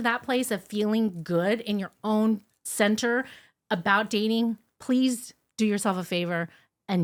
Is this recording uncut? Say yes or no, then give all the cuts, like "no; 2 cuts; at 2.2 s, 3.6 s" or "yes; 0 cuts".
yes; 0 cuts